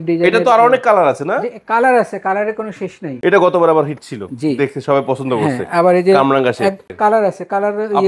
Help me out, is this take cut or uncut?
cut